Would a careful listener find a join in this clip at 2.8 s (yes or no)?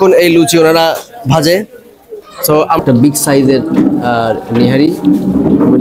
yes